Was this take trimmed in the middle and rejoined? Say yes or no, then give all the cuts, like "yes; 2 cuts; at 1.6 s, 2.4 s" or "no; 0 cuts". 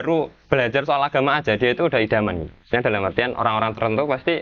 no; 0 cuts